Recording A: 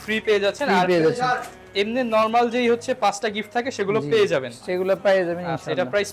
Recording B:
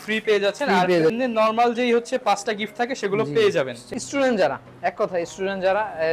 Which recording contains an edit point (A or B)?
B